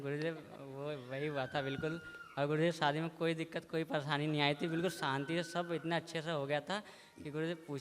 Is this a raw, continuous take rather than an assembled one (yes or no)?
yes